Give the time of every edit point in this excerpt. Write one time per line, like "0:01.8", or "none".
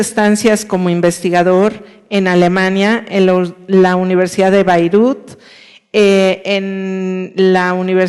0:02.4